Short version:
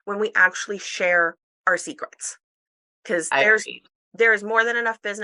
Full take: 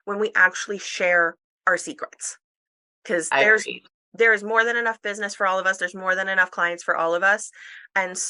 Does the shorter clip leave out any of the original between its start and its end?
no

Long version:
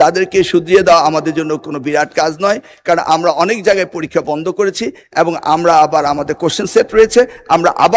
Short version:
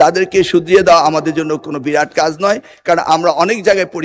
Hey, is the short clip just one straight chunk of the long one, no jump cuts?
yes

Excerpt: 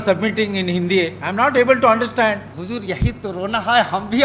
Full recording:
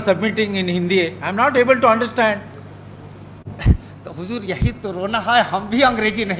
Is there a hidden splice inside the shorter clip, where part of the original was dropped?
yes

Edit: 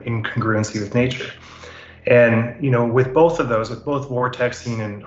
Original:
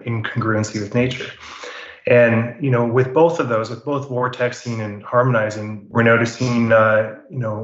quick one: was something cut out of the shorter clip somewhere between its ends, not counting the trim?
no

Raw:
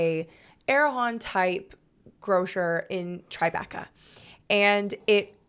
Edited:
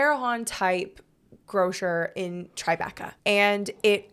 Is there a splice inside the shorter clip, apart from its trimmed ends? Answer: yes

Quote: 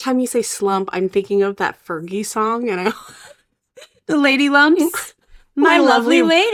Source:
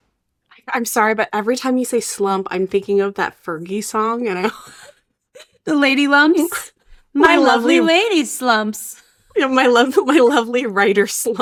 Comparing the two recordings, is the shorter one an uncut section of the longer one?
yes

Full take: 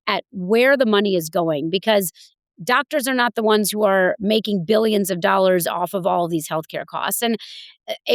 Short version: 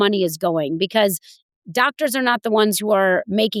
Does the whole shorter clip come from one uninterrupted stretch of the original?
yes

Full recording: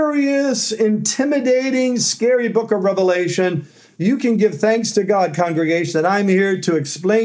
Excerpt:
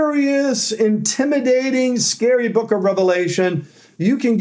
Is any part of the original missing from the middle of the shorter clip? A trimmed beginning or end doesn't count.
no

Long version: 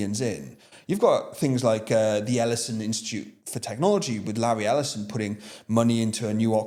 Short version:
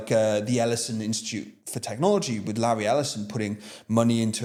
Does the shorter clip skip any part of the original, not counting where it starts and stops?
no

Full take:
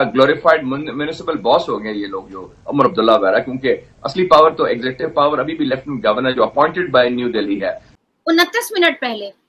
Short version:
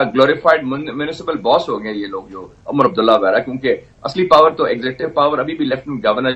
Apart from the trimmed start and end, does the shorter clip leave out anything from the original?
no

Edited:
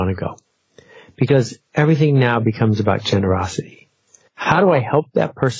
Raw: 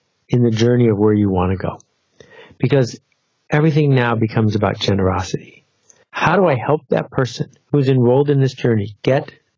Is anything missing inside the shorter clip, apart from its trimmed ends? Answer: yes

